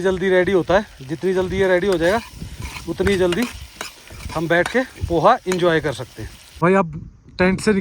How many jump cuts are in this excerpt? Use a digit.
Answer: 1